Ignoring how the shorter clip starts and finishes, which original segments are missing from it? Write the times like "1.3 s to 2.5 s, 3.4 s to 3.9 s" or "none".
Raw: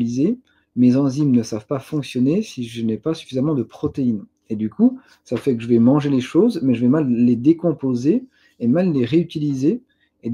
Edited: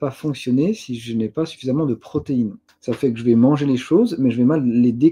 4.4 s to 5.1 s